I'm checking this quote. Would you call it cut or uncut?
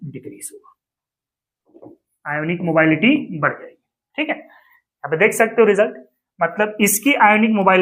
cut